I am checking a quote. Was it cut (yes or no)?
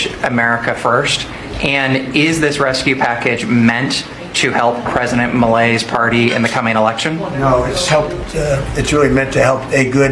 no